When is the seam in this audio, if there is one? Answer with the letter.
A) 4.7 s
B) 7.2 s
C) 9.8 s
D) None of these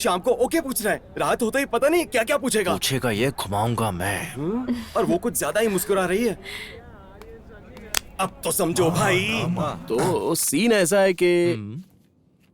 C